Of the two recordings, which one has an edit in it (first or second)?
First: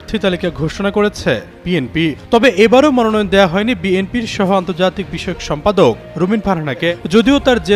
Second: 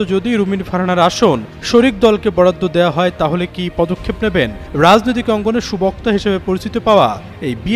first